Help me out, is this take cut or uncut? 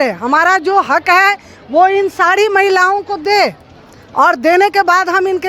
uncut